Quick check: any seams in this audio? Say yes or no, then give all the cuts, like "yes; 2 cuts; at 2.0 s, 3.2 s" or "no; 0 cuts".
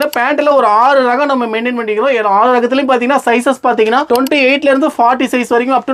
no; 0 cuts